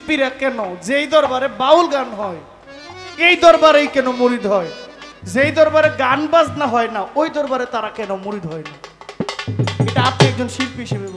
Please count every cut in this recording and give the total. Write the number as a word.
zero